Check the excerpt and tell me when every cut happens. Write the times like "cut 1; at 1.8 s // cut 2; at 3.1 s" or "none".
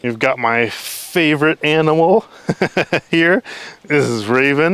none